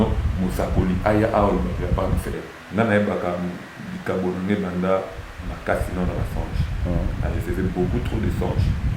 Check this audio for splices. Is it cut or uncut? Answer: cut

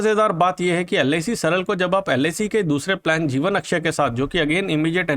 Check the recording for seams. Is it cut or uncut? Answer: uncut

